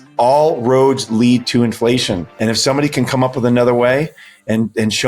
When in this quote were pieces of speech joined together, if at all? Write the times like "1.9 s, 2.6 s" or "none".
2.3 s